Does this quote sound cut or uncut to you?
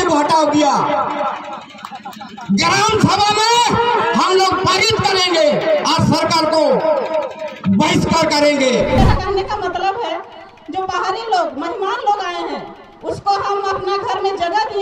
cut